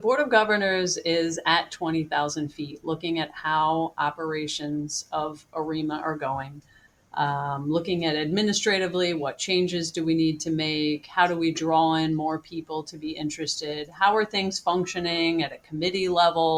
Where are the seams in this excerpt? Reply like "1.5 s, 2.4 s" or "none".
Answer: none